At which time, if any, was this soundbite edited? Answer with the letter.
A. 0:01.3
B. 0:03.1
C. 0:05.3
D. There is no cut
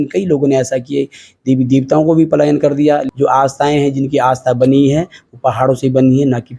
B